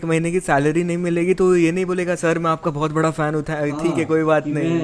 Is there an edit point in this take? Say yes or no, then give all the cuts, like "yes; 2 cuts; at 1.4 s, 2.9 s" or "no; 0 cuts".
no; 0 cuts